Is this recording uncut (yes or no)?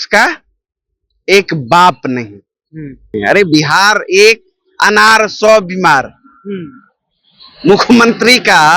no